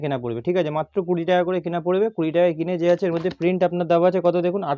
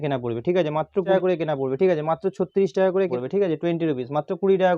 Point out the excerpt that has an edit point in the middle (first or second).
second